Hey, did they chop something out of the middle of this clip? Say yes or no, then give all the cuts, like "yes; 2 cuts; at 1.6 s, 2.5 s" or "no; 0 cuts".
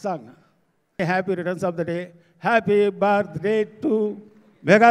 yes; 1 cut; at 1.0 s